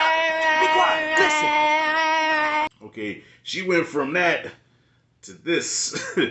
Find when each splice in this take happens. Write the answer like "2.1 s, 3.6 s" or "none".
2.8 s